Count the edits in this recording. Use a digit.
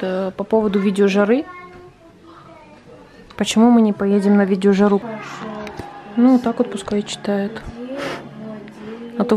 1